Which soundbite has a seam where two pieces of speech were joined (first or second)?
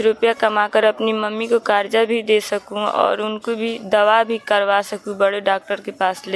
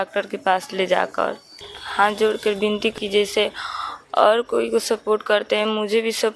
second